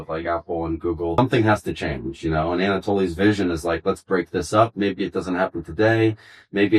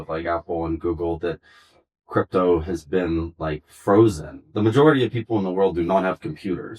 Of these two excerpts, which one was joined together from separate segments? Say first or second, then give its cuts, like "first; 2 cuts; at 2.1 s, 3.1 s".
first; 1 cut; at 1.2 s